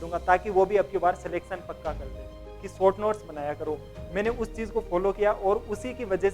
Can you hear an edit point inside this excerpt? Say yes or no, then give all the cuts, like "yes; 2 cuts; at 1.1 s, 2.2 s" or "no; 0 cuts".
yes; 1 cut; at 2.4 s